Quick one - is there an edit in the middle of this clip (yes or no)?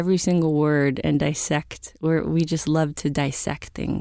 no